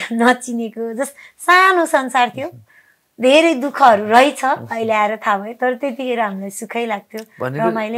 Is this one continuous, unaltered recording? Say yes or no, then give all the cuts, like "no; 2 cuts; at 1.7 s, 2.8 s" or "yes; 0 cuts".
yes; 0 cuts